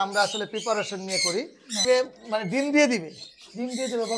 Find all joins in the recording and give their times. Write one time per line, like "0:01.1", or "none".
0:01.8